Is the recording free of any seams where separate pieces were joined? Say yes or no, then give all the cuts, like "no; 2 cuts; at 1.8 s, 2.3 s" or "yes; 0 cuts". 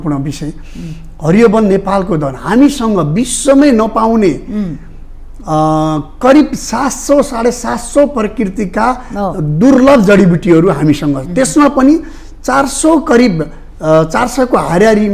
yes; 0 cuts